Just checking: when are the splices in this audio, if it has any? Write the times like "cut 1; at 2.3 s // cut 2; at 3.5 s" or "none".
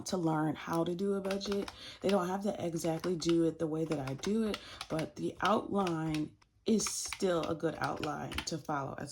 cut 1; at 6.4 s